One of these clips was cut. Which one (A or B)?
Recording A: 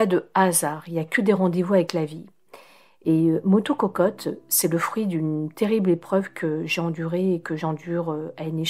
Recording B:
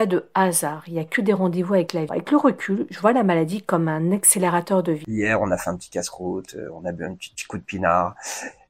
B